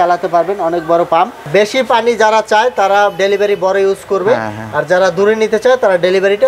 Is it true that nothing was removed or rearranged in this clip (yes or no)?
no